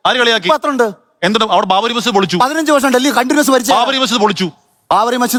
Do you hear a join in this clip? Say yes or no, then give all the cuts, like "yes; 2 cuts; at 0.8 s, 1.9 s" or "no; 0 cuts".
no; 0 cuts